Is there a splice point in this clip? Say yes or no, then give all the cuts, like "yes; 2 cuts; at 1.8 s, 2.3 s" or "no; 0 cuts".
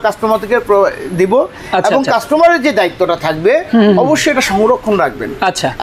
no; 0 cuts